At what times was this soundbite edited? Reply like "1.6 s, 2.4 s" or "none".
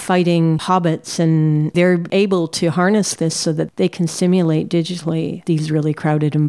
none